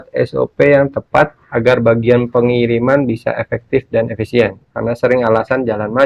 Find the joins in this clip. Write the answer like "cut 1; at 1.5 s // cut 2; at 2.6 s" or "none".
cut 1; at 1.4 s // cut 2; at 4.7 s